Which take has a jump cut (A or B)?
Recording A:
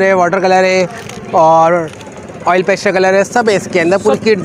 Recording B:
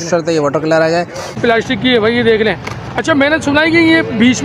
B